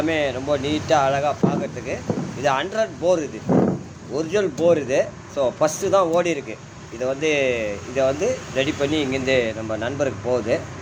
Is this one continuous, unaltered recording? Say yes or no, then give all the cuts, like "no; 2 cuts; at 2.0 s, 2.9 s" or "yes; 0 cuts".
yes; 0 cuts